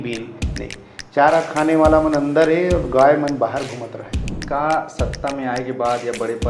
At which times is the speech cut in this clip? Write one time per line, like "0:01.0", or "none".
0:04.4